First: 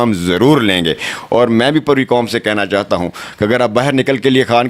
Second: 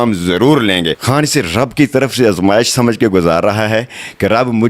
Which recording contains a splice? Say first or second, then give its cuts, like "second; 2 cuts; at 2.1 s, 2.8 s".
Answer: second; 1 cut; at 1.0 s